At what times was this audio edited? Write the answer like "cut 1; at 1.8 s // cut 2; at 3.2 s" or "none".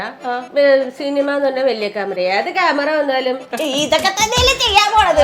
cut 1; at 3.5 s